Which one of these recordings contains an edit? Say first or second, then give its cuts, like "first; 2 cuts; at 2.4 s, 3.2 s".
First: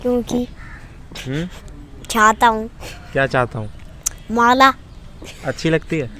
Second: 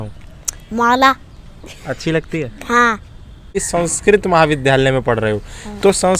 second; 1 cut; at 3.6 s